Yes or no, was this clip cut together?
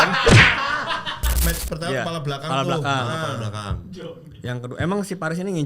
yes